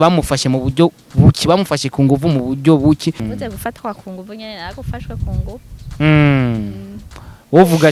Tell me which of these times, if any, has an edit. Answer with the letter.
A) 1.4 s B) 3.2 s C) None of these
B